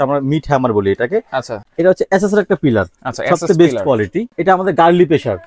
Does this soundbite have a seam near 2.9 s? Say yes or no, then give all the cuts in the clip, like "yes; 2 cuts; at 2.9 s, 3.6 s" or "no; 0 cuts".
no; 2 cuts; at 1.5 s, 4.3 s